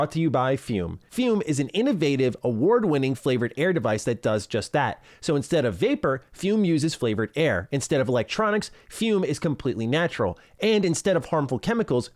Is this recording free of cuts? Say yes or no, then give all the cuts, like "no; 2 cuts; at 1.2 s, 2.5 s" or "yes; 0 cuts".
no; 1 cut; at 1.0 s